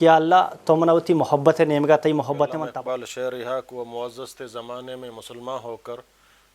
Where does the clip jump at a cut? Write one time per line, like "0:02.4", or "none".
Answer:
0:02.6